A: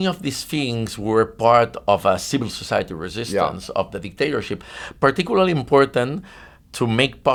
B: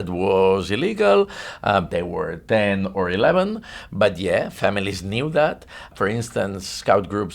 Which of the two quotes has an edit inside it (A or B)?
B